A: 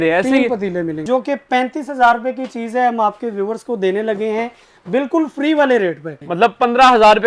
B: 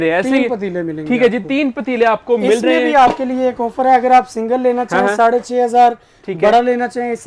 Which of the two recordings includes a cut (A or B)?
A